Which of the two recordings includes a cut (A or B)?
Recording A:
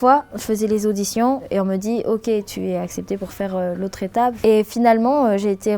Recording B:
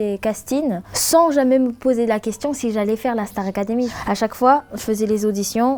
A